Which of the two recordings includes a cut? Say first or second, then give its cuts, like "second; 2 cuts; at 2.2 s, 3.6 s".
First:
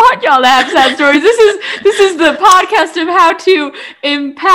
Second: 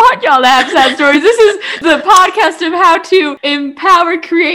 second; 2 cuts; at 1.8 s, 3.4 s